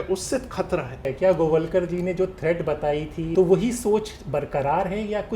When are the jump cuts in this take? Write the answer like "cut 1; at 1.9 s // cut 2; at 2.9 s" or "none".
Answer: cut 1; at 1.0 s // cut 2; at 3.3 s

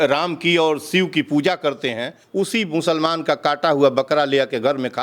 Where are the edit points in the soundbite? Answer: cut 1; at 2.2 s

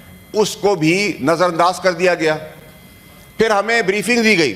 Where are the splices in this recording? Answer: none

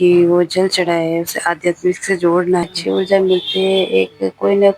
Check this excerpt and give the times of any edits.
cut 1; at 2.7 s

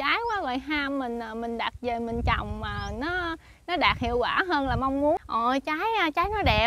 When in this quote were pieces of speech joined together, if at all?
cut 1; at 5.2 s

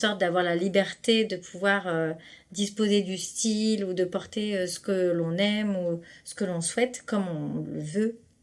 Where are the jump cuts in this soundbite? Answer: none

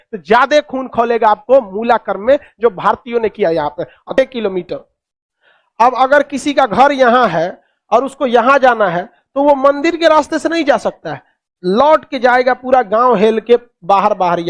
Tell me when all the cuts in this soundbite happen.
cut 1; at 4.1 s

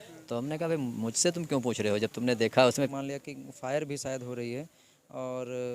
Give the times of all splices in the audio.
cut 1; at 2.8 s

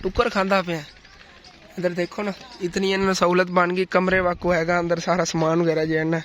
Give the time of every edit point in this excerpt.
none

